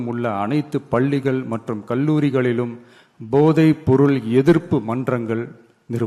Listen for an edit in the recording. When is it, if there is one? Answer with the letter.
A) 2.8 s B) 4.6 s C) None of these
C